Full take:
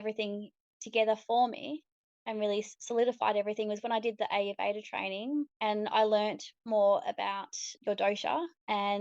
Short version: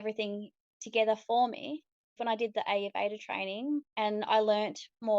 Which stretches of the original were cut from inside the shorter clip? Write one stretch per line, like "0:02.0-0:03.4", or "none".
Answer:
0:02.2-0:03.8